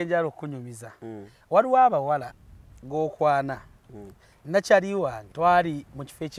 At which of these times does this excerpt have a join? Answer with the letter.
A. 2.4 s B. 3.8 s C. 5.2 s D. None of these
C